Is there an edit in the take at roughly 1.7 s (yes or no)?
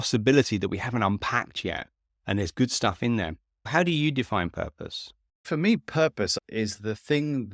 no